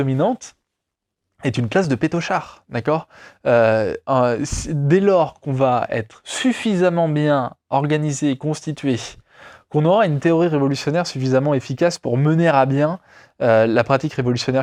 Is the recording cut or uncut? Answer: uncut